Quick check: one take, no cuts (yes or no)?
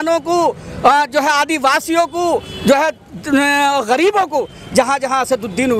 yes